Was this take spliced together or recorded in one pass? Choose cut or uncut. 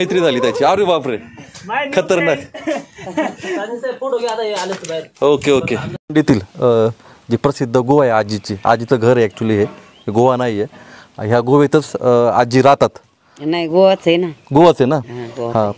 uncut